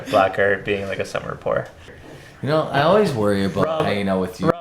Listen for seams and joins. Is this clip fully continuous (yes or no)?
no